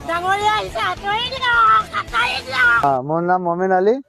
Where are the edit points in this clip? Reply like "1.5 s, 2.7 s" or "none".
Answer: 2.7 s